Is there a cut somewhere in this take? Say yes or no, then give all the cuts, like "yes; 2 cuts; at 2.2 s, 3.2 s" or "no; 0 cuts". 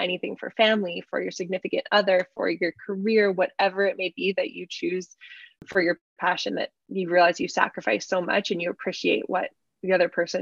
yes; 1 cut; at 5.6 s